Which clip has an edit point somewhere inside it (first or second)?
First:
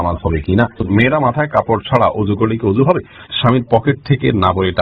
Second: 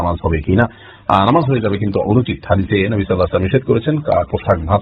first